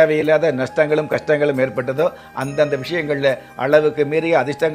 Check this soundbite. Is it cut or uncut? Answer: uncut